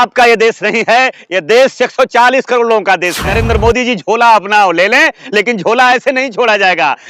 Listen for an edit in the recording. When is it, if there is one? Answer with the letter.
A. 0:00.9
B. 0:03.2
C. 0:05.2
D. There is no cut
B